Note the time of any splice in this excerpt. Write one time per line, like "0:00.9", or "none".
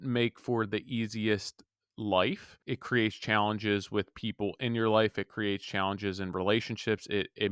0:02.5